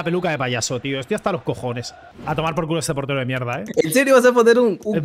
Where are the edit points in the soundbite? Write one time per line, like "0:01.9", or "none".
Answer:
0:02.2
0:03.6